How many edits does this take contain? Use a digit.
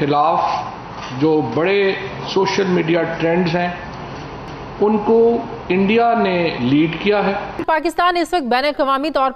1